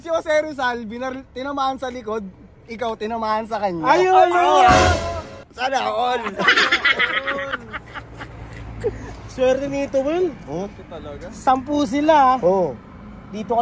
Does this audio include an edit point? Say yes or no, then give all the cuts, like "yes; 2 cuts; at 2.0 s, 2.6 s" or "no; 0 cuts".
no; 0 cuts